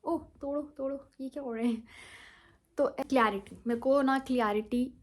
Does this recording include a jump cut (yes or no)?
yes